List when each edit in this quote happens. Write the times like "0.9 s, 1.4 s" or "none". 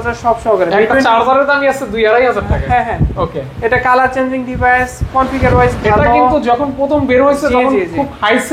none